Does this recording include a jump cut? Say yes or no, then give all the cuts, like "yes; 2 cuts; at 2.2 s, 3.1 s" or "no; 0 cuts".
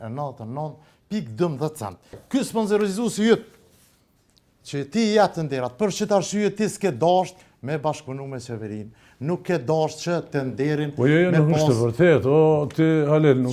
yes; 1 cut; at 2.2 s